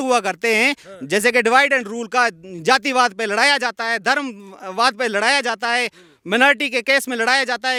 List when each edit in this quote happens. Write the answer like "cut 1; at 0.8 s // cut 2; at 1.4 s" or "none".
none